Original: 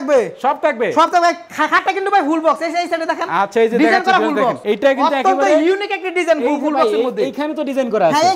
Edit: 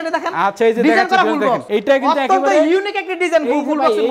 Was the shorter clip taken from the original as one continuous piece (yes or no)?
yes